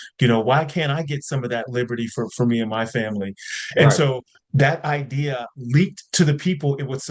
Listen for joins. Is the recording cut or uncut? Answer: cut